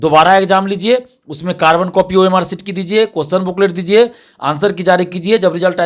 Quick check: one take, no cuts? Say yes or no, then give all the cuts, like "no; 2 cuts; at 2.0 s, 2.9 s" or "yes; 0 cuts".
yes; 0 cuts